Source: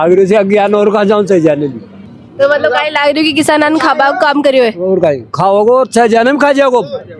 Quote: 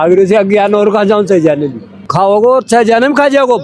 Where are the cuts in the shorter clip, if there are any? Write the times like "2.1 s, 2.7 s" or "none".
2.0 s

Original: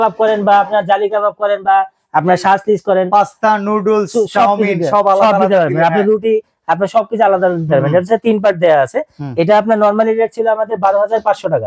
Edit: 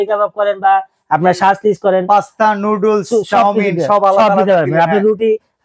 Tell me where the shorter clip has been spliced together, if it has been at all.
none

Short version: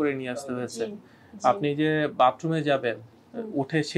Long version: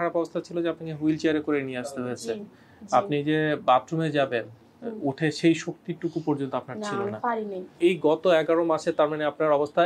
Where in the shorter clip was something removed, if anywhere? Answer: none

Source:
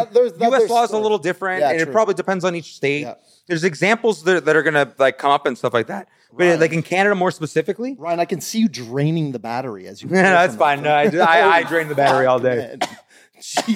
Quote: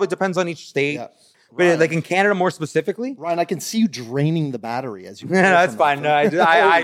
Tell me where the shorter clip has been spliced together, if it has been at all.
1.2 s

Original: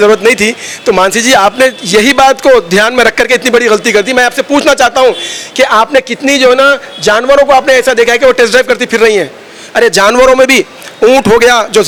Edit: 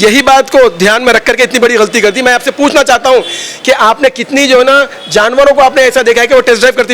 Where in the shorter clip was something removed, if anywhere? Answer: none

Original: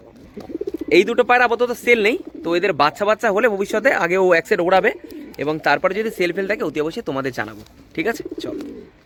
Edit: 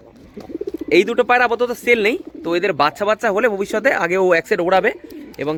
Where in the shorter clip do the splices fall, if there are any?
none

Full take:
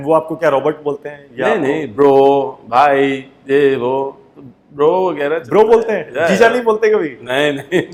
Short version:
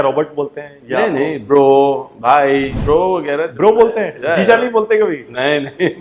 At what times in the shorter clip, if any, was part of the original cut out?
2.7 s

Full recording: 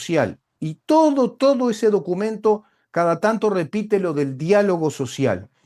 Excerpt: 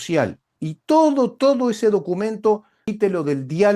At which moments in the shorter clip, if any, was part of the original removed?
2.8 s

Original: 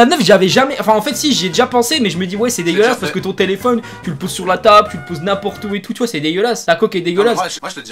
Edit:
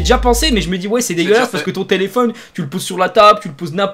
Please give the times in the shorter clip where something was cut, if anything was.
none

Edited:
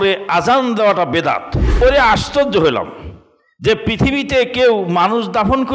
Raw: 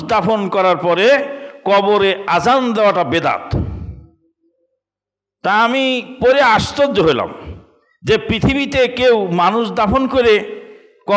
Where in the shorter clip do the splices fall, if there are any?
1.7 s

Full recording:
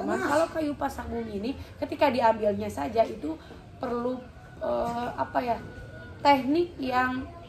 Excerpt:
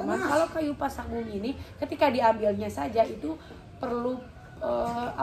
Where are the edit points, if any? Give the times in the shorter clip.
none

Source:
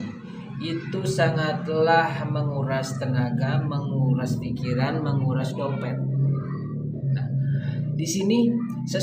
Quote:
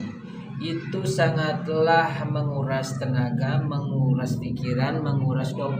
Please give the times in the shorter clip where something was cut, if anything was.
none

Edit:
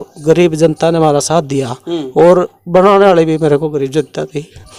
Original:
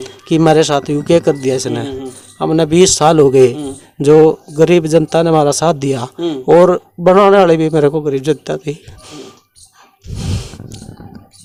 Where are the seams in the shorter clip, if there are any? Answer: none

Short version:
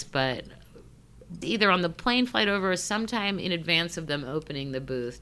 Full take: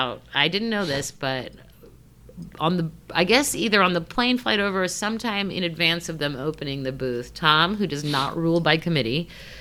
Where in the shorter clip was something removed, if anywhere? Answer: 1.4 s

